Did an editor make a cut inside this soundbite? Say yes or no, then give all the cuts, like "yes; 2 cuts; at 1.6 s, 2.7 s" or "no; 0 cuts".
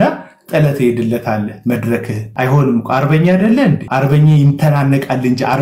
yes; 2 cuts; at 2.2 s, 3.8 s